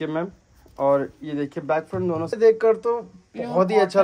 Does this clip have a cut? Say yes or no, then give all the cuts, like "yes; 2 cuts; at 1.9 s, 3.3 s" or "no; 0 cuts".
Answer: yes; 1 cut; at 2.3 s